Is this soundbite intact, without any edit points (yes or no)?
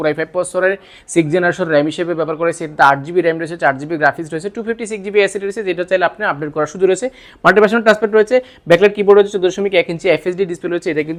yes